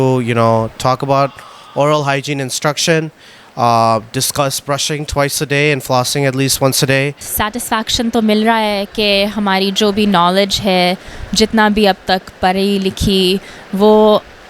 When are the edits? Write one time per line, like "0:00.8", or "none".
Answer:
0:07.2